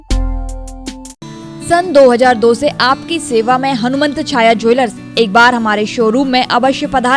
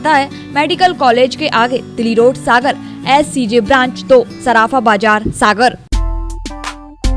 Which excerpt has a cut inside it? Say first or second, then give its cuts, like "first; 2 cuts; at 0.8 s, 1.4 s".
second; 1 cut; at 5.8 s